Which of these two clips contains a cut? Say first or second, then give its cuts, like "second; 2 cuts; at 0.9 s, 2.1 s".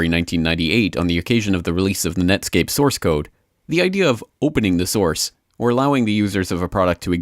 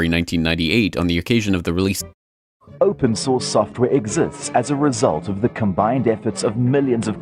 first; 1 cut; at 2.0 s